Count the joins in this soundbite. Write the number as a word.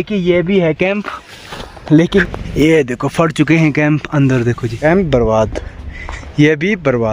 two